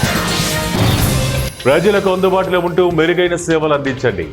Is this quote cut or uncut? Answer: cut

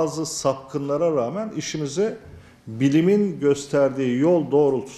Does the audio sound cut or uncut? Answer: uncut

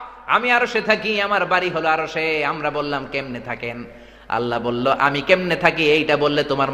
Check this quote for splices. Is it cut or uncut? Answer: uncut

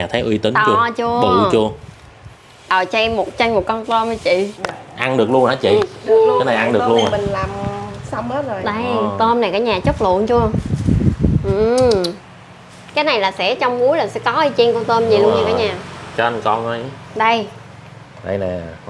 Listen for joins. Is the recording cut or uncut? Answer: uncut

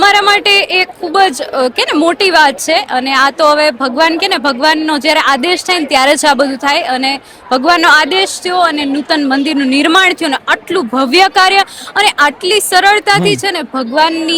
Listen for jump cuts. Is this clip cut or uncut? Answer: uncut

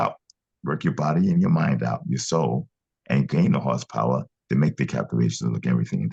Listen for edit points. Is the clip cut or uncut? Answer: uncut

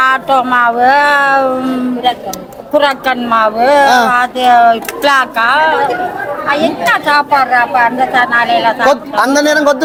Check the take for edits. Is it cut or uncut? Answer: uncut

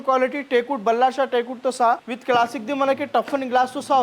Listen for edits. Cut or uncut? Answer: cut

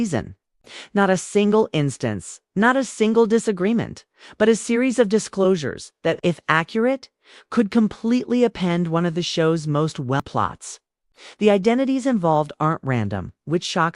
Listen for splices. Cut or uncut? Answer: cut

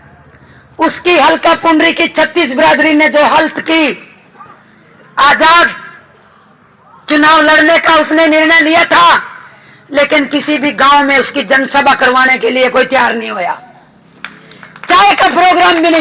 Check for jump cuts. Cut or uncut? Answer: uncut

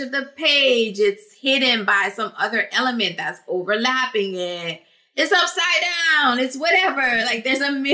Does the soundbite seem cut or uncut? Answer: uncut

